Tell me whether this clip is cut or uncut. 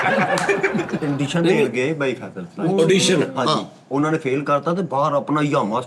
cut